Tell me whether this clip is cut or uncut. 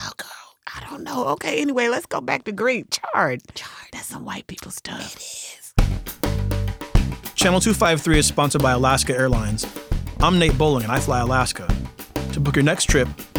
cut